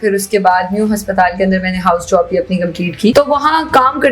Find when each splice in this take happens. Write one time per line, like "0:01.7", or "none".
0:03.1